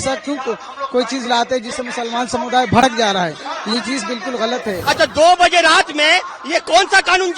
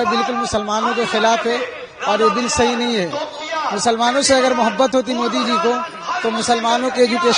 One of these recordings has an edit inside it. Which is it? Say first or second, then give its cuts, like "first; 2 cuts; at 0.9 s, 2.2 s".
first; 1 cut; at 4.8 s